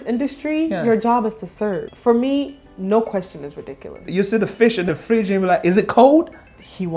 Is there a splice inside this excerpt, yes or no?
yes